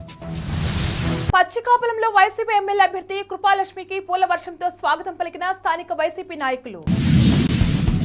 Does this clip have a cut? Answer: yes; 1 cut; at 1.3 s

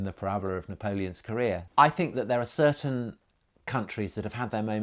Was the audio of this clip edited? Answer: yes; 1 cut; at 1.6 s

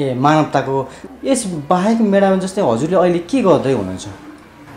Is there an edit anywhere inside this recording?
yes; 1 cut; at 1.0 s

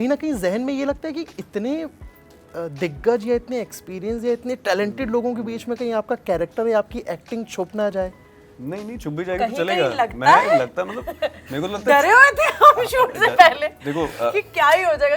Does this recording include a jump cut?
no; 0 cuts

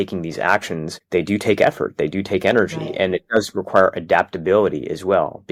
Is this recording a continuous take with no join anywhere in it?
yes; 0 cuts

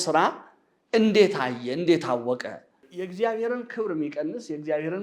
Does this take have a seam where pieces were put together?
yes; 1 cut; at 2.8 s

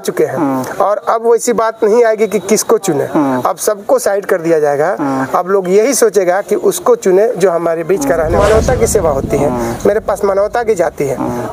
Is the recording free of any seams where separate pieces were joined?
no; 1 cut; at 8.3 s

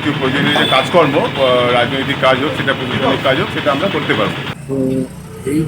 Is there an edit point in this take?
yes; 1 cut; at 4.5 s

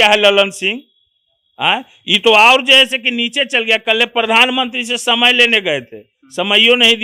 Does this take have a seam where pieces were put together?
no; 0 cuts

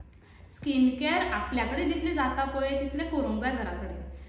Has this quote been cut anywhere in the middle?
no; 0 cuts

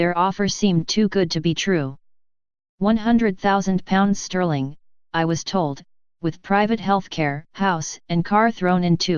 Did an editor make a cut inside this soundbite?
no; 0 cuts

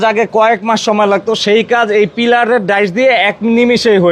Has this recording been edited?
no; 0 cuts

